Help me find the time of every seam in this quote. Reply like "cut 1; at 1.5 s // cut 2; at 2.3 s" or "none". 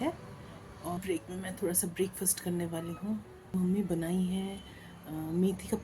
cut 1; at 1.0 s // cut 2; at 3.5 s